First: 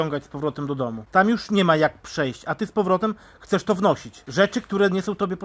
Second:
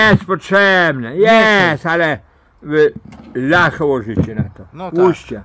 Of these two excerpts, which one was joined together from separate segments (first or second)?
first